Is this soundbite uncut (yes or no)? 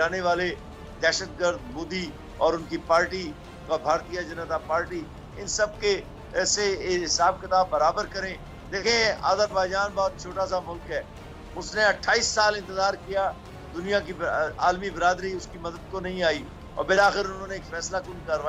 yes